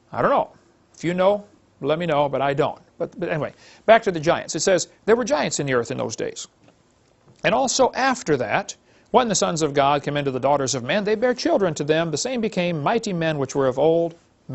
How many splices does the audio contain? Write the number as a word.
one